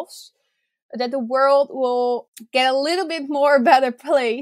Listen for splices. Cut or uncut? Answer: cut